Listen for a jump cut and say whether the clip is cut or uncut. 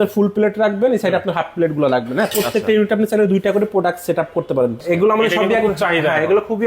cut